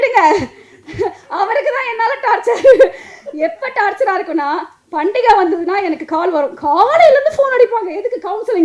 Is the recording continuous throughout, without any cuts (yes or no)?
yes